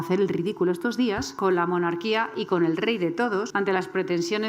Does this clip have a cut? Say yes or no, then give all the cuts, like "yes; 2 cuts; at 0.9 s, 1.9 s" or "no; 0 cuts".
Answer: yes; 2 cuts; at 1.3 s, 3.5 s